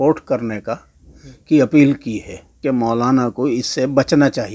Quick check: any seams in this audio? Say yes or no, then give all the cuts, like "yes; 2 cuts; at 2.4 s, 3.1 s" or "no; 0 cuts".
yes; 1 cut; at 2.6 s